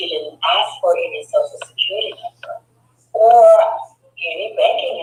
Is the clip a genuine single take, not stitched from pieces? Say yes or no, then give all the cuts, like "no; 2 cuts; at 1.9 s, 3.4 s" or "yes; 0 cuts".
yes; 0 cuts